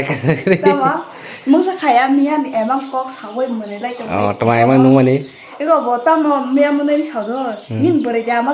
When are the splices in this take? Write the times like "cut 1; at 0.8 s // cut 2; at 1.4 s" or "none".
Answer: none